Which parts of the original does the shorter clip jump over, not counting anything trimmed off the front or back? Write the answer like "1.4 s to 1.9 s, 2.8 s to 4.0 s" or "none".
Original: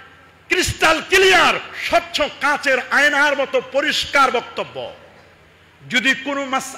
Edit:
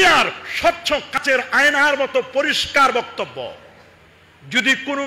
2.5 s to 2.6 s